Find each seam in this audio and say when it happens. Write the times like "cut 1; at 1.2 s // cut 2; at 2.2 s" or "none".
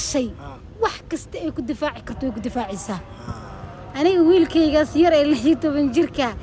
none